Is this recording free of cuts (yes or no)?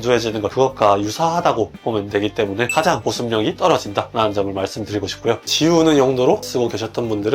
no